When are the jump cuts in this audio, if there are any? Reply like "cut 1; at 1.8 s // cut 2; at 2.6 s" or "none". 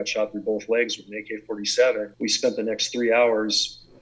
cut 1; at 2.1 s